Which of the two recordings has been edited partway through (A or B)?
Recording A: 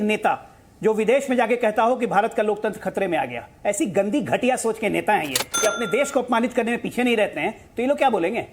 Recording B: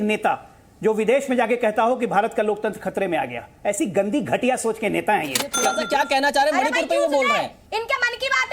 B